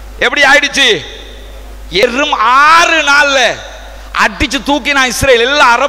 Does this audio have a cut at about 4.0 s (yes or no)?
no